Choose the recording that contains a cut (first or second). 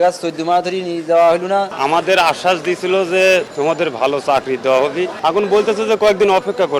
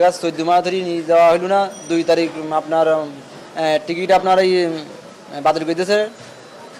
first